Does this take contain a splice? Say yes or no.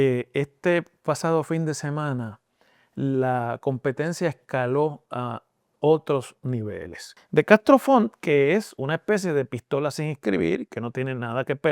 yes